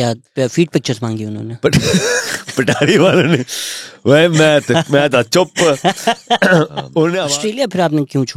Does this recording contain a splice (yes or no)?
yes